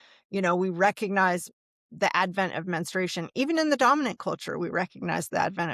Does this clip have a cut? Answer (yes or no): no